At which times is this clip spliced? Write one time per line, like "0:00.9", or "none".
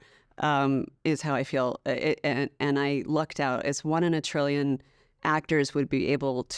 none

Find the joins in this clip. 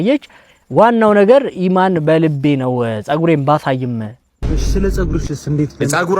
0:04.2

